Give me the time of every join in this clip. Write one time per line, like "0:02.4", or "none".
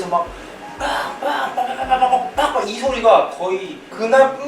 none